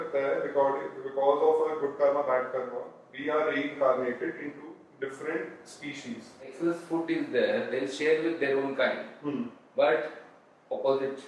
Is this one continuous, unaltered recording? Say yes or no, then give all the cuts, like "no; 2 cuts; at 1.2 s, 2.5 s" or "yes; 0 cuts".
no; 1 cut; at 6.5 s